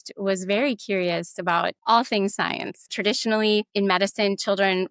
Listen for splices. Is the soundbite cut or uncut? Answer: cut